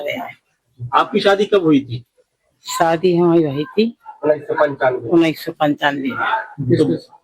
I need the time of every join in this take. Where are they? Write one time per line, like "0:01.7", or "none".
0:04.1